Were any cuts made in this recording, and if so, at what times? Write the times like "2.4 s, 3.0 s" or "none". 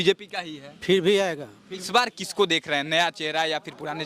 1.8 s